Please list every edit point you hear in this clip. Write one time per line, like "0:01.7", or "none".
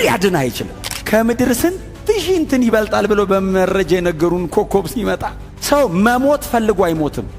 0:00.9